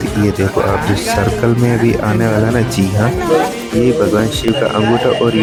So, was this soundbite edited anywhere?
no; 0 cuts

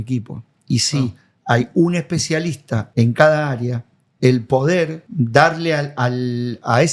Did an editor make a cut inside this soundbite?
yes; 2 cuts; at 2.8 s, 5.0 s

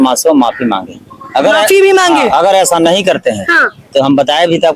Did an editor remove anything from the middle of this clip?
no; 0 cuts

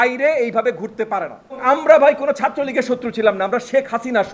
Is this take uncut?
no; 1 cut; at 1.6 s

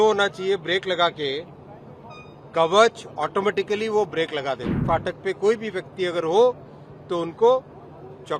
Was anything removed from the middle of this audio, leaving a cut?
yes; 1 cut; at 4.8 s

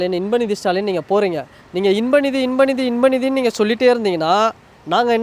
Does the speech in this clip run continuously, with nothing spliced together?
yes; 0 cuts

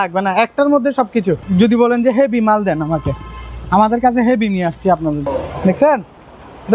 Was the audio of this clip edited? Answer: yes; 2 cuts; at 1.4 s, 5.3 s

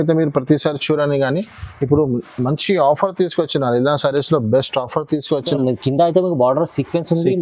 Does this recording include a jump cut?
yes; 1 cut; at 5.5 s

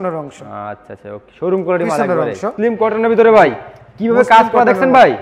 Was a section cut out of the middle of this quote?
yes; 1 cut; at 2.5 s

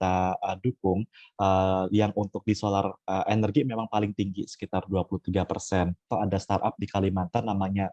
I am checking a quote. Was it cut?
yes; 1 cut; at 6.0 s

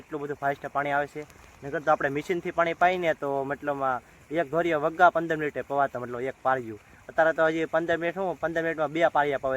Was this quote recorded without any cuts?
yes; 0 cuts

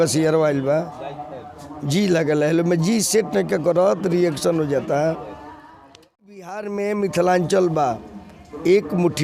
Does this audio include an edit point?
yes; 1 cut; at 6.5 s

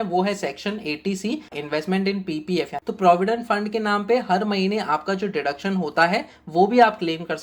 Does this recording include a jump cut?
yes; 2 cuts; at 1.6 s, 2.8 s

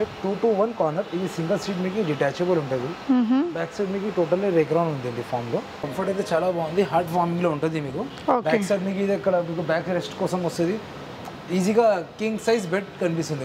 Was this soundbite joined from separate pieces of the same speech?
yes; 2 cuts; at 5.8 s, 8.1 s

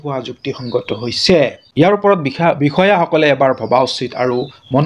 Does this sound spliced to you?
no; 0 cuts

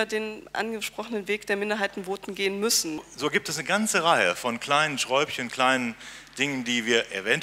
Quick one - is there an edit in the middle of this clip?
yes; 1 cut; at 3.1 s

